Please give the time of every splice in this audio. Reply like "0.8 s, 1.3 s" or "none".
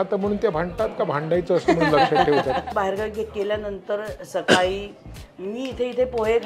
2.7 s